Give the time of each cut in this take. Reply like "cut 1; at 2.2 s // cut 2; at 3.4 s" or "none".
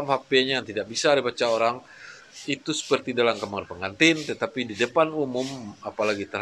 none